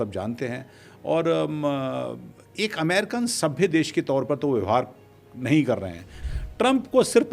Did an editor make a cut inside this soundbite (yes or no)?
yes